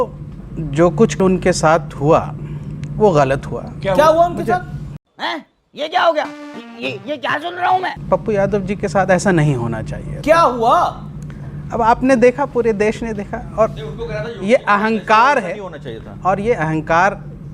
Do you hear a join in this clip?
no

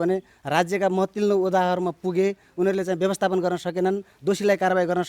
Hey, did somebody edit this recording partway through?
no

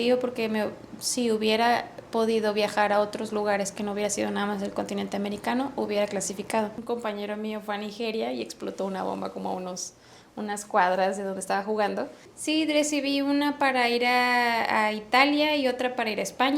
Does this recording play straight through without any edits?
no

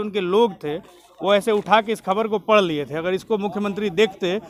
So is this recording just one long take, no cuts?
yes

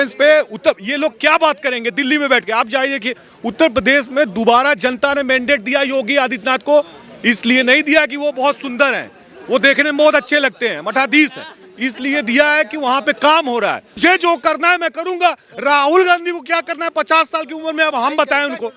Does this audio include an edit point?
yes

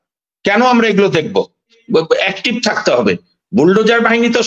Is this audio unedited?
no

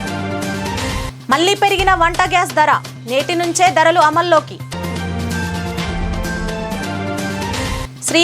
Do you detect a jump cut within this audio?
yes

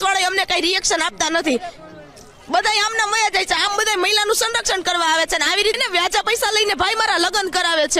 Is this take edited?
yes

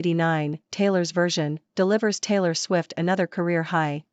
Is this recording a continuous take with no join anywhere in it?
yes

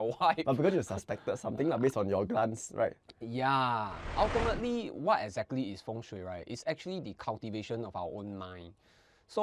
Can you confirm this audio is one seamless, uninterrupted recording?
no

